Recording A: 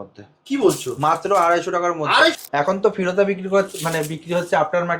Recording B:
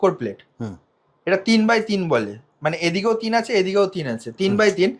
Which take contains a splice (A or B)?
A